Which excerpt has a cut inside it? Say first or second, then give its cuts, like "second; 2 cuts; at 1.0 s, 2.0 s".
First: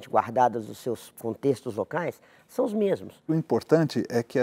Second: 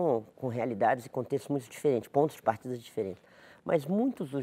first; 1 cut; at 3.2 s